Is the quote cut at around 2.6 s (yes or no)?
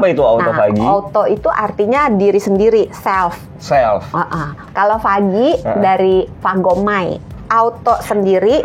no